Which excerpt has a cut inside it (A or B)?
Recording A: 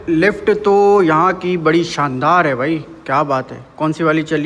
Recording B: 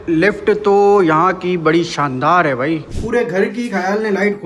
B